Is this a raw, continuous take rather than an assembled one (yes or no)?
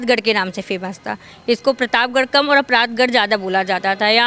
yes